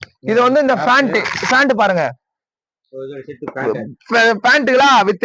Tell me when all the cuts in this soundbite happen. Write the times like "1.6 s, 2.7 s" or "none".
none